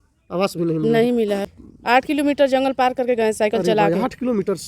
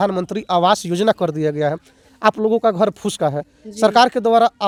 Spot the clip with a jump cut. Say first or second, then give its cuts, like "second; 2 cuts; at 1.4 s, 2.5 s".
first; 1 cut; at 1.5 s